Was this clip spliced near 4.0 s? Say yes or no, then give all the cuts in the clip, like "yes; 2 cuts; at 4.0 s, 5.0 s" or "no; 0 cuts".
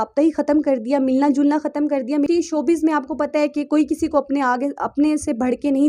no; 1 cut; at 2.3 s